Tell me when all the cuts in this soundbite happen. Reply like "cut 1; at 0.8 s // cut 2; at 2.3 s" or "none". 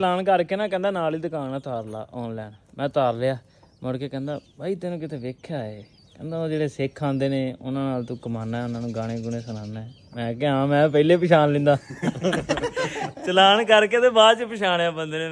none